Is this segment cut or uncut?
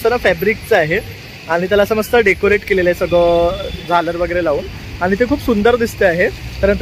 uncut